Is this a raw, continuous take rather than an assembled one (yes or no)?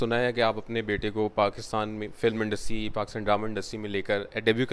yes